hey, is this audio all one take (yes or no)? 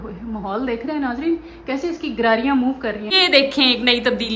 no